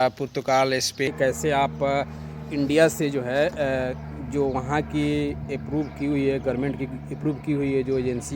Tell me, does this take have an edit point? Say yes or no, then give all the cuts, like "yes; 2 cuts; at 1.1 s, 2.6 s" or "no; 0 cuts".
yes; 1 cut; at 1.1 s